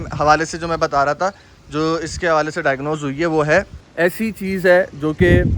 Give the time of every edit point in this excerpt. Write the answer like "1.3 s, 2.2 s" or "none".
3.8 s

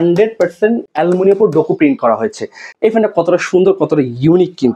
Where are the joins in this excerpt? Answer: 0.9 s, 2.6 s

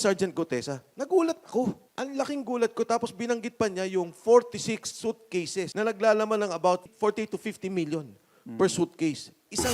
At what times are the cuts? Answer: 1.9 s, 5.7 s, 6.9 s

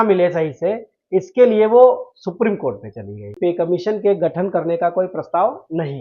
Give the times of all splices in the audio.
3.4 s

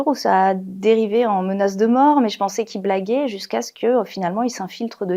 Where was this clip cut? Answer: none

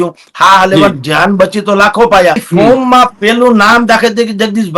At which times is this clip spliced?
2.4 s

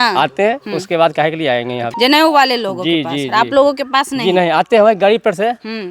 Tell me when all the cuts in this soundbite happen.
1.9 s

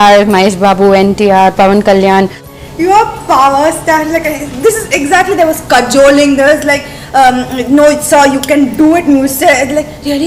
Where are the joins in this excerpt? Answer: 2.5 s

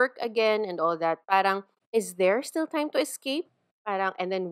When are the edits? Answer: 1.7 s

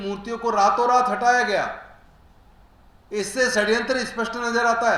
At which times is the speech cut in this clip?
none

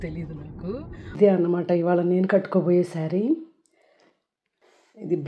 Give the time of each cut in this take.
1.1 s

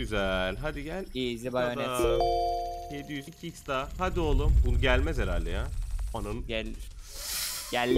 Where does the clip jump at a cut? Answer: 3.3 s

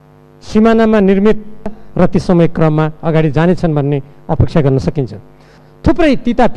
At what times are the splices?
5.6 s

